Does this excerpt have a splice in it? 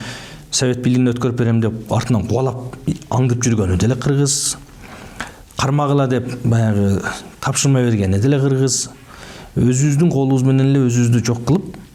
no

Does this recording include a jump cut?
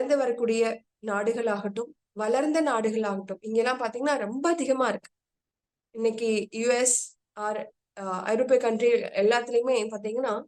no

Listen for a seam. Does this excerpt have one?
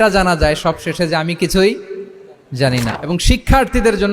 yes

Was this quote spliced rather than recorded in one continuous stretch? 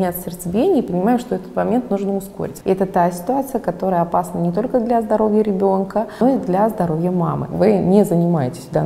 yes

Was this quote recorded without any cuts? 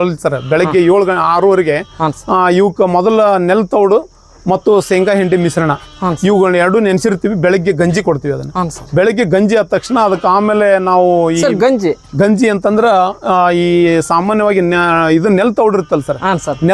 yes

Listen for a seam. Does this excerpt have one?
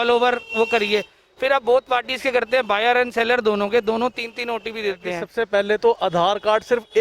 yes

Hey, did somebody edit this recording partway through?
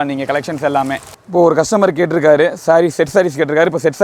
yes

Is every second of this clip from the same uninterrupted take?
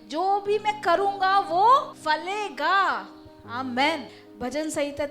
no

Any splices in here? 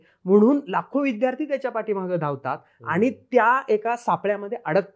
no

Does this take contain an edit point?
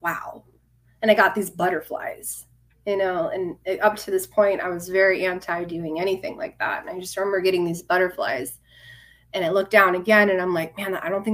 no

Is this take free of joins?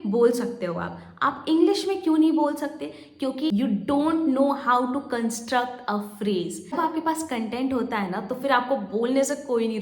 no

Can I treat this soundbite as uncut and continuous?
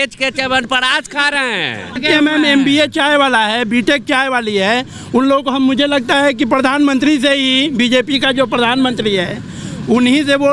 no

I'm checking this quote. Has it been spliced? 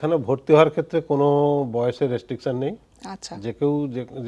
no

